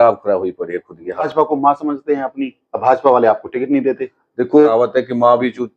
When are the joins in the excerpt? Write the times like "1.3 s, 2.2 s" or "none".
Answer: 1.3 s, 4.7 s